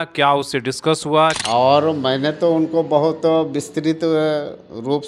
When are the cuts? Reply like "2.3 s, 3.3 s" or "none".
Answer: 1.4 s